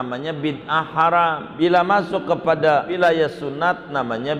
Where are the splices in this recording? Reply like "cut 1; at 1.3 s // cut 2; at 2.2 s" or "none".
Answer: cut 1; at 1.5 s // cut 2; at 3.0 s